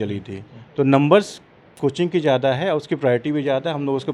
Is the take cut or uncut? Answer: uncut